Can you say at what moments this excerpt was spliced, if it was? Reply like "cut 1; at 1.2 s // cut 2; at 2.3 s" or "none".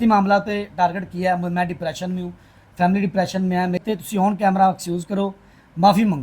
cut 1; at 3.8 s